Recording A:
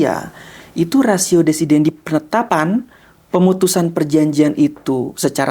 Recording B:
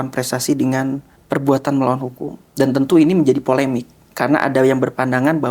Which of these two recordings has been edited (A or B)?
A